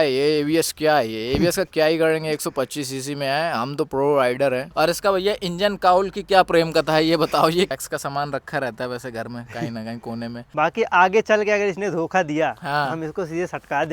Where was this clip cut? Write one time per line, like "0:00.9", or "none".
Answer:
0:04.7
0:07.7
0:10.5

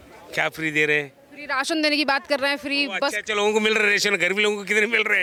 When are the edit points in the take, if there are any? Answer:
none

